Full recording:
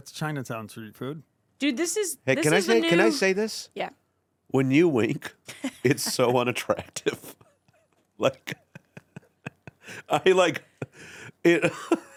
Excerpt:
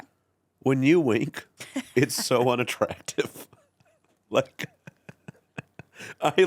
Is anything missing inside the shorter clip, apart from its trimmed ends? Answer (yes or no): no